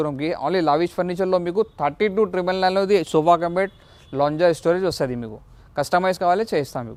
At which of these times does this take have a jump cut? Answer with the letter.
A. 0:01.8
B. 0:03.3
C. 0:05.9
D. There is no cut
D